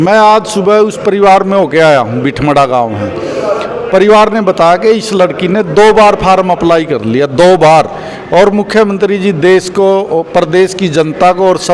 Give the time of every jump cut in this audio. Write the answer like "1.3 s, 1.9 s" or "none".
none